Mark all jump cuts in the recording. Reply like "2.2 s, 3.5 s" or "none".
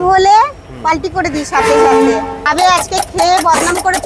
2.4 s